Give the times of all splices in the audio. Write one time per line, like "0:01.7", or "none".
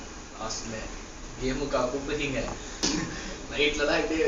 0:02.9